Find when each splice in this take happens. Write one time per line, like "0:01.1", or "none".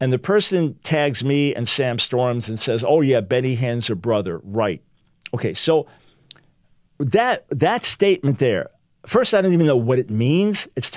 none